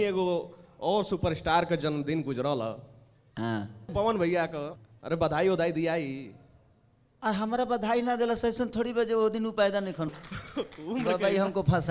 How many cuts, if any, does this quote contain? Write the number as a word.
three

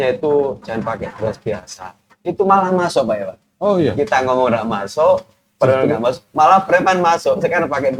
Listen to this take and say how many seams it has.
zero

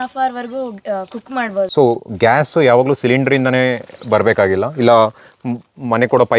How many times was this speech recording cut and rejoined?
one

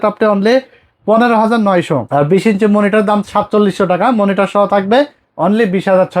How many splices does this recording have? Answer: two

